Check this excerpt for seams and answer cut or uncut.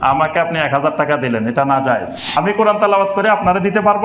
cut